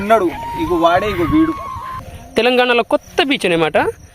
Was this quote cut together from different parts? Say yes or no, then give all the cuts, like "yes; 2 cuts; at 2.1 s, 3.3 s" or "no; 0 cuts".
yes; 1 cut; at 2.0 s